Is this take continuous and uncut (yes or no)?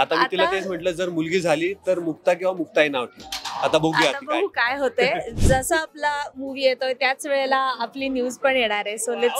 yes